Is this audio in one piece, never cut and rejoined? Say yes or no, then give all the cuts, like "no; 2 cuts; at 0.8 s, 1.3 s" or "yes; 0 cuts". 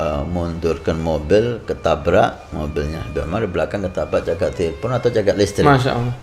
yes; 0 cuts